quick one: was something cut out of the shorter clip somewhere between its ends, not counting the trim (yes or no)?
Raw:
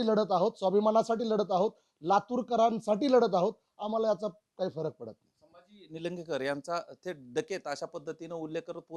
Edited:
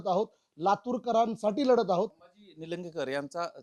yes